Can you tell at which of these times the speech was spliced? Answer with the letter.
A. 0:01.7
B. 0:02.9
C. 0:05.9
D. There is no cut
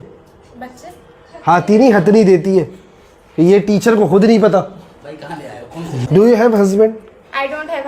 C